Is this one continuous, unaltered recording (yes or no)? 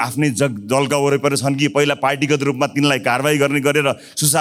yes